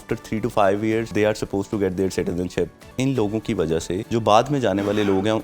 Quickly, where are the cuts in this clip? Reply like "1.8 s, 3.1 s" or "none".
1.1 s, 2.8 s, 4.0 s